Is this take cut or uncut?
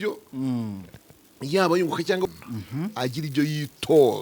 cut